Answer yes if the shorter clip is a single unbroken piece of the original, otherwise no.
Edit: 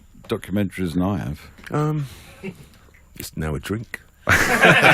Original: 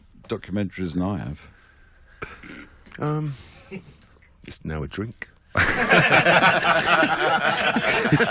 no